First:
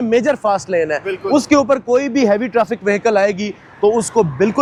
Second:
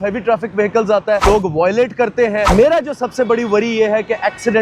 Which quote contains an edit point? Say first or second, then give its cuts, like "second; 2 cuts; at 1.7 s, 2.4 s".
second; 2 cuts; at 1.2 s, 2.5 s